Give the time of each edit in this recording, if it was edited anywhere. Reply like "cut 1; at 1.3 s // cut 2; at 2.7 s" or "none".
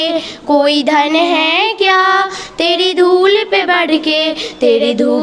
none